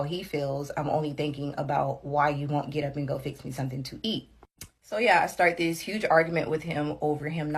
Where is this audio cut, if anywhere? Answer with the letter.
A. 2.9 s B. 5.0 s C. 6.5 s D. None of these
A